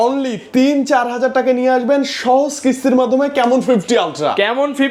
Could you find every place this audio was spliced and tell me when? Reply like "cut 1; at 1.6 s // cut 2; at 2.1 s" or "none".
none